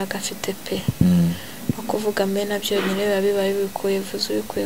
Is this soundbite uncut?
yes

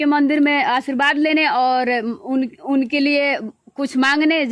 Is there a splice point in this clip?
no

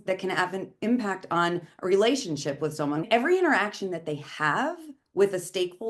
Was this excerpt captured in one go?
no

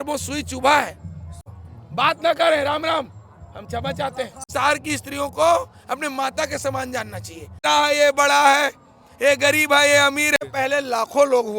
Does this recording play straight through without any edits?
no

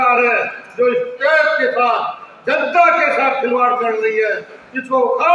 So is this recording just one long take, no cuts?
yes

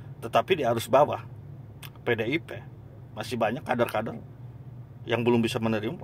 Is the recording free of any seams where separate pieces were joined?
yes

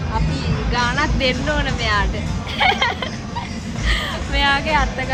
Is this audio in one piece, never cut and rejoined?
yes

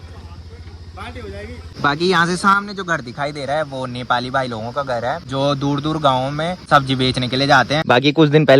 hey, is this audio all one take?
no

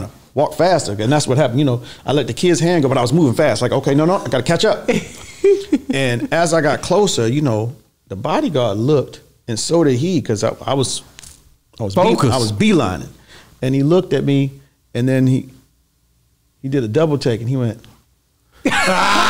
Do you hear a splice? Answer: no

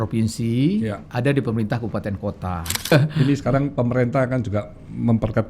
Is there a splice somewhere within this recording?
yes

